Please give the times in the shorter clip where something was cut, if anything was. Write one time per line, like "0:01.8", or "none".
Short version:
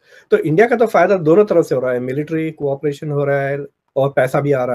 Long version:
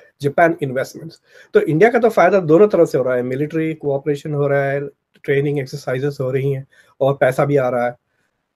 0:03.8